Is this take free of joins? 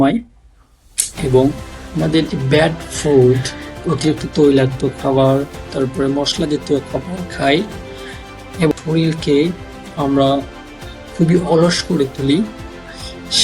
no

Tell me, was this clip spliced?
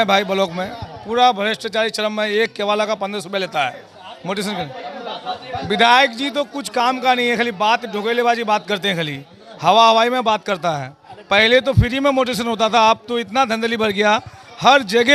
no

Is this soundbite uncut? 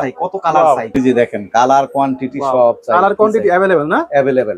no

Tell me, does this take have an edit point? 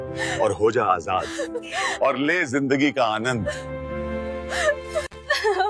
no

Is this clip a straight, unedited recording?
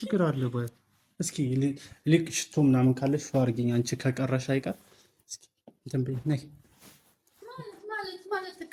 yes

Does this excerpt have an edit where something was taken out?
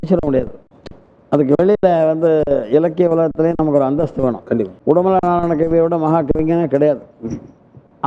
yes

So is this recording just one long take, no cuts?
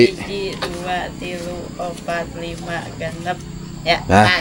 yes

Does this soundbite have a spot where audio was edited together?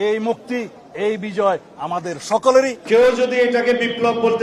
yes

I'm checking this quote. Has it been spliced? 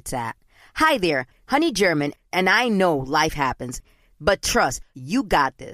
no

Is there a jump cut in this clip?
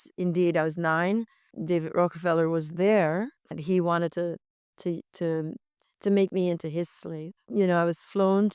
yes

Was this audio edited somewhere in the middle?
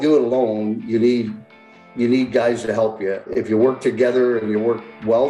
yes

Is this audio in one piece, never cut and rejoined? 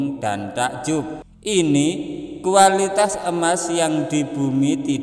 no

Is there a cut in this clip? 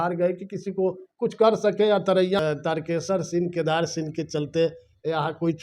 yes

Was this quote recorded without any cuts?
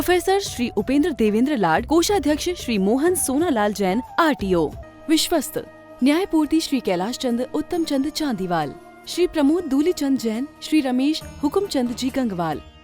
no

